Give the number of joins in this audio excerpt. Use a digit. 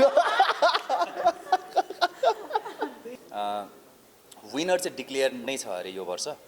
1